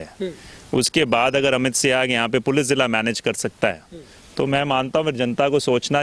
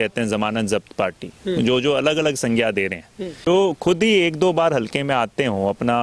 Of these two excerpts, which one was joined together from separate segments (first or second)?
second